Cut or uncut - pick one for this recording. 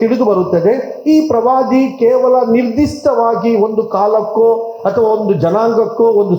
uncut